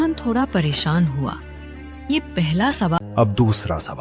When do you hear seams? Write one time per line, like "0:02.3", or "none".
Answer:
0:03.0